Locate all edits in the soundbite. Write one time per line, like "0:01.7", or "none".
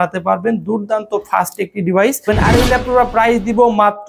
0:02.2